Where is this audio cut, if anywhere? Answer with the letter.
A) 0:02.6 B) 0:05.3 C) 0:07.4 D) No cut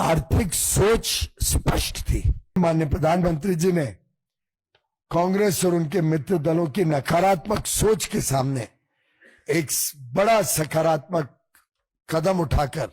A